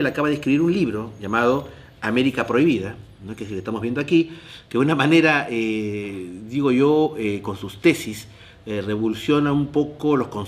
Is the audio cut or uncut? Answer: cut